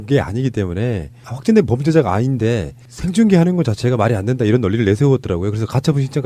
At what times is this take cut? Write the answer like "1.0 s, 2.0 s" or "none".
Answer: none